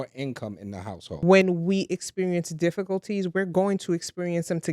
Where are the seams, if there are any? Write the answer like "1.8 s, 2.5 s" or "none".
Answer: 1.1 s